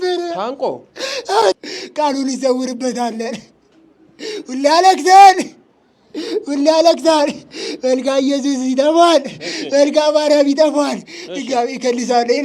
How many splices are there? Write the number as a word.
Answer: one